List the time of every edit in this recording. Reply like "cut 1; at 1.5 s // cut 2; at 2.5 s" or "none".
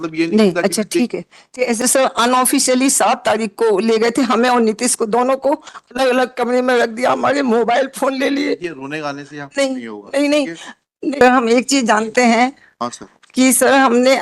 cut 1; at 1.8 s // cut 2; at 11.2 s